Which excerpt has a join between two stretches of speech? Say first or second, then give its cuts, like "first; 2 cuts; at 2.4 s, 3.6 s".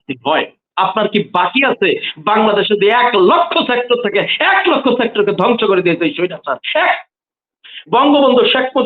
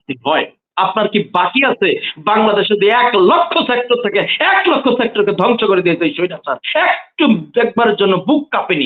first; 1 cut; at 7.1 s